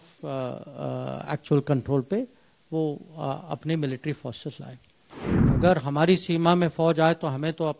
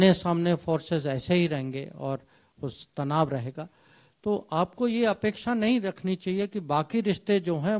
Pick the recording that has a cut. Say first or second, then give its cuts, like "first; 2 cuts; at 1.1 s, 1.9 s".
first; 1 cut; at 5.4 s